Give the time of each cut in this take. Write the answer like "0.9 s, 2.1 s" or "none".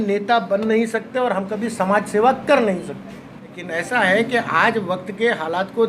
3.6 s